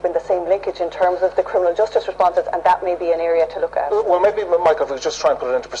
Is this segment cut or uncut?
uncut